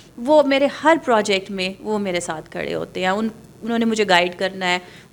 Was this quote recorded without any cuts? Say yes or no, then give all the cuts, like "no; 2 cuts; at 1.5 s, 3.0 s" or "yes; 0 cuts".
yes; 0 cuts